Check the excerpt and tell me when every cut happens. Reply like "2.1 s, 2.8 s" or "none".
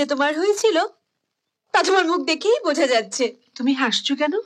none